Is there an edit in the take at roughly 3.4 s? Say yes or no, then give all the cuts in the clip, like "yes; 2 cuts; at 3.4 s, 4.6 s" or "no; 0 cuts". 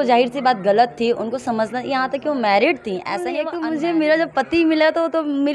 yes; 1 cut; at 3.4 s